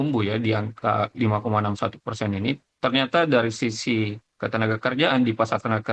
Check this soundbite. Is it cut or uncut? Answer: uncut